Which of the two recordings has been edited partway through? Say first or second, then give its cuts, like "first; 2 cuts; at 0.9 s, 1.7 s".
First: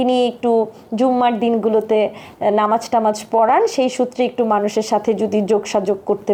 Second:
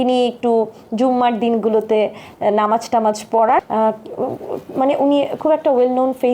second; 1 cut; at 3.6 s